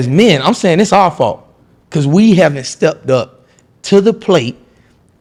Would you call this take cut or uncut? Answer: uncut